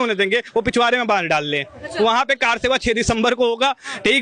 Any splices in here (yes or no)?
no